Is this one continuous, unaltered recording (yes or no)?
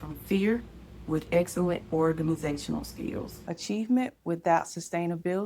no